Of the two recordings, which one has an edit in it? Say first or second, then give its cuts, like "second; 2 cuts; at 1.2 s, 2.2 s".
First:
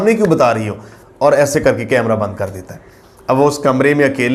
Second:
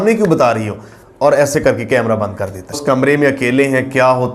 second; 1 cut; at 2.8 s